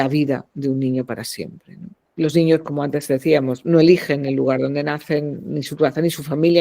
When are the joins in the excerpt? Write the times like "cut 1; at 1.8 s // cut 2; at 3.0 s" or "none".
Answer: cut 1; at 2.0 s